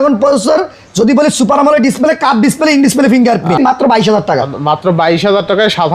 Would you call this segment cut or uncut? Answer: cut